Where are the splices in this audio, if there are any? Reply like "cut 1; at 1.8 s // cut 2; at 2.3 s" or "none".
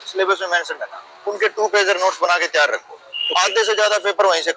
none